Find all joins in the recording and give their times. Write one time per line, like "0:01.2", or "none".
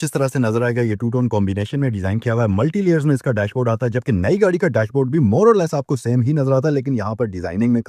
none